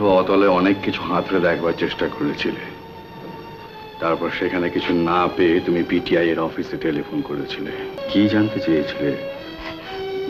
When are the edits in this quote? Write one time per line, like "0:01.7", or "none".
0:08.0